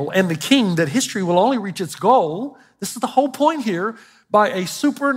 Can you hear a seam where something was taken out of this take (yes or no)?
no